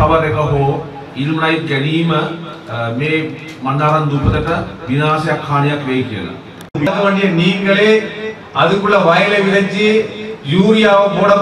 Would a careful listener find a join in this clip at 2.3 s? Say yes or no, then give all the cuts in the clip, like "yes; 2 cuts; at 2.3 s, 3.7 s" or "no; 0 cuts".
no; 1 cut; at 6.9 s